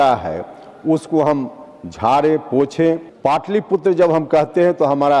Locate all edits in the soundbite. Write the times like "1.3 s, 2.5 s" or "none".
3.1 s